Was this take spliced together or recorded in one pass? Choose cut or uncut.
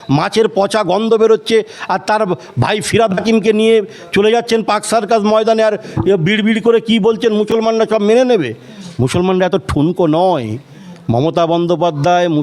uncut